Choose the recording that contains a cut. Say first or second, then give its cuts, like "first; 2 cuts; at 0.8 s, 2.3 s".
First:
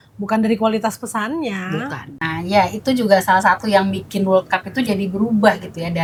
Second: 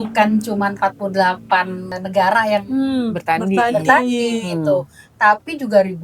second; 1 cut; at 1.9 s